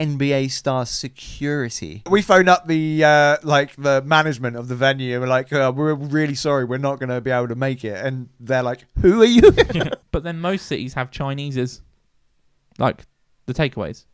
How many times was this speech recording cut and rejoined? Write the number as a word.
two